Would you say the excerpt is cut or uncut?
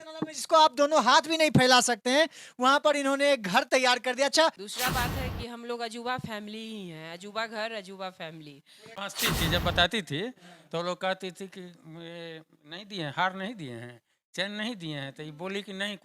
cut